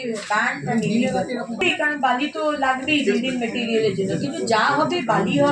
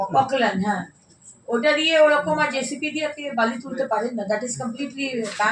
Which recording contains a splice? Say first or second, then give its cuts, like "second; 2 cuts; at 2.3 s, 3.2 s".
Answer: first; 1 cut; at 1.5 s